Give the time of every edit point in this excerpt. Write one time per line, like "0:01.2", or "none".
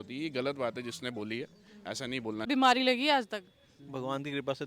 0:02.5